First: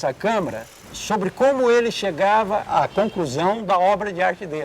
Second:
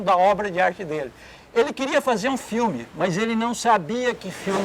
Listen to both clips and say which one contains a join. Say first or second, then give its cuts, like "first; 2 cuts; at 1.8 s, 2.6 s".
first; 1 cut; at 2.7 s